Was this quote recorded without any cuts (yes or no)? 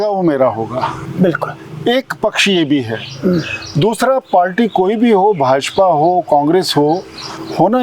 yes